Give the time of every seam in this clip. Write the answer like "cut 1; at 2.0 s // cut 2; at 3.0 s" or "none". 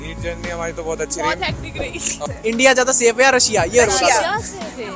cut 1; at 2.2 s